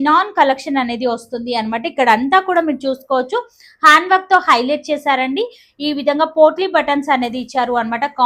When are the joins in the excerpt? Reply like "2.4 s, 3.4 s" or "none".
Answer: none